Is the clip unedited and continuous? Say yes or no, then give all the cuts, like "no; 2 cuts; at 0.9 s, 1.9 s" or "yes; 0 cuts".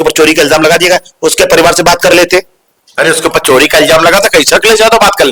yes; 0 cuts